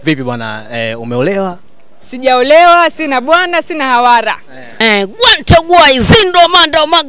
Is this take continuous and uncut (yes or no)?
yes